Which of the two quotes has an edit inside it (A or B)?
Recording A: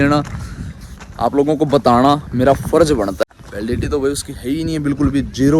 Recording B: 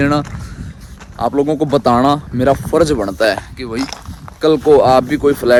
A